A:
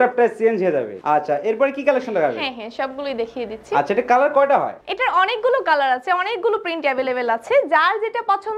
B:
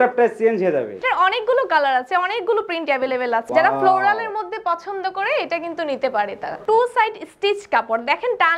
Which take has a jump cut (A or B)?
B